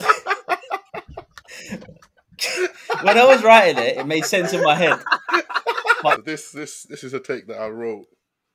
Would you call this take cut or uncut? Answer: cut